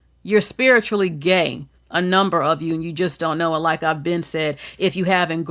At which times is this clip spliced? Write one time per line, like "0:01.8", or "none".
none